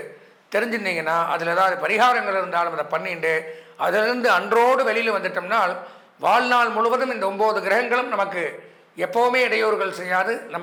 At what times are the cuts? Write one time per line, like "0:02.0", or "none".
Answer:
none